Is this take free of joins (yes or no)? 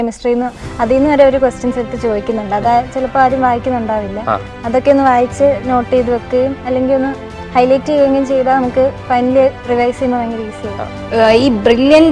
no